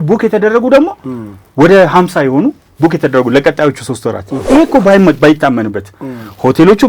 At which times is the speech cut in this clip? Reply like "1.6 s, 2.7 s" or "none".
4.3 s